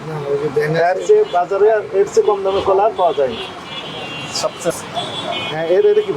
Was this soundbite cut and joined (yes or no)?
no